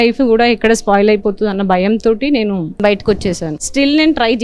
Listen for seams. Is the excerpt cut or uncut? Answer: cut